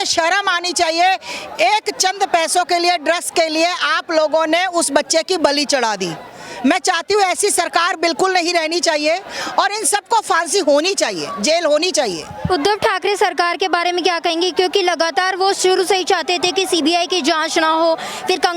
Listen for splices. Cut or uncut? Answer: uncut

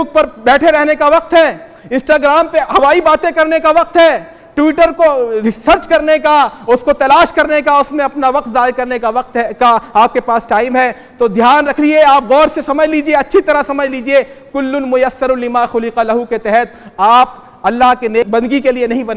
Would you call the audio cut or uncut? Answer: cut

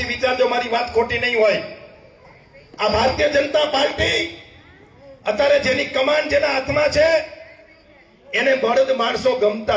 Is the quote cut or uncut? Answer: uncut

